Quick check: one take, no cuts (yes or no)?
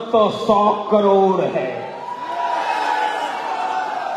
yes